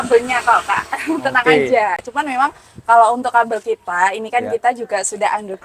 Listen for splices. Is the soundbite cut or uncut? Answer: uncut